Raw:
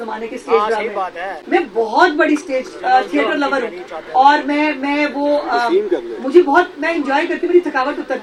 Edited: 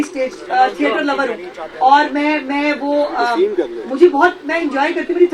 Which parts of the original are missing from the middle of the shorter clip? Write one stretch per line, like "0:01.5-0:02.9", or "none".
none